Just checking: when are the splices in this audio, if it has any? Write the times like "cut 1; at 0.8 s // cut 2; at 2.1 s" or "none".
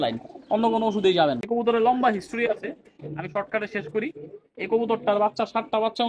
cut 1; at 1.4 s